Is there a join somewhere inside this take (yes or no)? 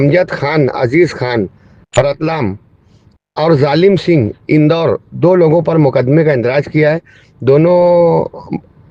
no